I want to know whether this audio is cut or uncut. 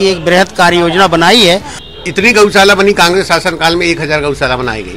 cut